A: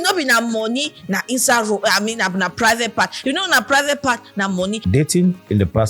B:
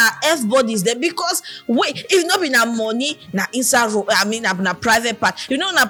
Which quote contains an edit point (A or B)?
A